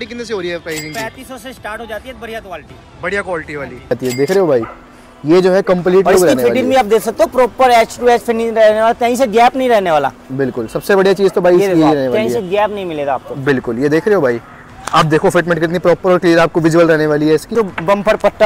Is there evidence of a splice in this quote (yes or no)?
yes